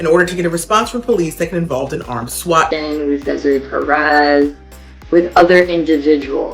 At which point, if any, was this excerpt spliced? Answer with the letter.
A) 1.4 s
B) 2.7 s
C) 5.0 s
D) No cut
B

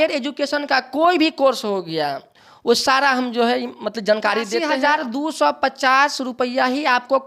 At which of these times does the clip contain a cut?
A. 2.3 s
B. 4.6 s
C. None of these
B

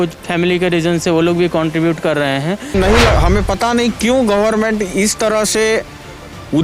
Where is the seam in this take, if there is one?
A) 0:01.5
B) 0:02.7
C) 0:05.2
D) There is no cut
B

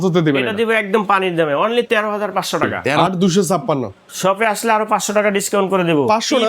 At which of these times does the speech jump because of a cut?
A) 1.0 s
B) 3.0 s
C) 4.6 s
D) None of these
B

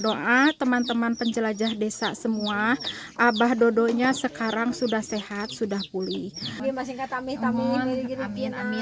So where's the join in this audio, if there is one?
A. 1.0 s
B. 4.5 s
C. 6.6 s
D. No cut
C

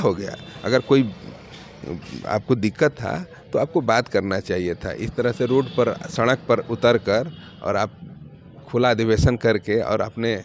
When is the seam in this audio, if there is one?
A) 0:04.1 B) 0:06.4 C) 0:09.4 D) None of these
D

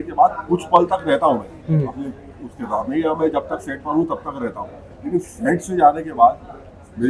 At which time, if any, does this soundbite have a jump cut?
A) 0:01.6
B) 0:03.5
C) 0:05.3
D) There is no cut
D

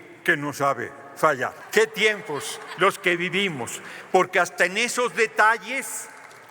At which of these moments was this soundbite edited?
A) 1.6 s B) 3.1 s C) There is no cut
A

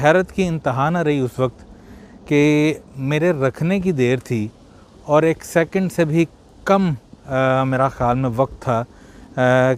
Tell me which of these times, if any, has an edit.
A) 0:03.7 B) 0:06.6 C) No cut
C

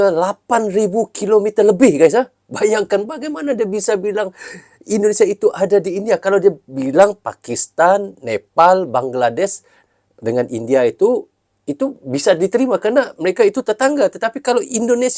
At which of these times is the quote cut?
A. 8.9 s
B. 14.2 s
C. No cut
C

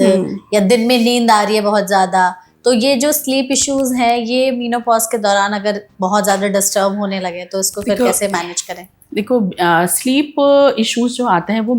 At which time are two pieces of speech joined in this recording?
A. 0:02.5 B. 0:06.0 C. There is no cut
C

